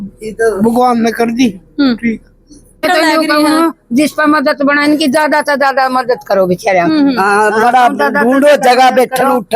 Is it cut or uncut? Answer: cut